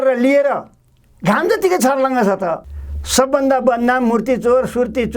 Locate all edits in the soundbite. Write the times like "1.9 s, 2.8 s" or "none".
2.6 s